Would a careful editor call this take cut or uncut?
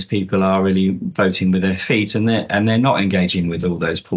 uncut